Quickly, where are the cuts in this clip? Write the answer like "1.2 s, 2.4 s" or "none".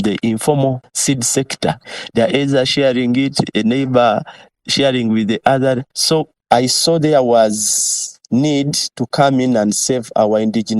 0.9 s, 1.8 s, 6.3 s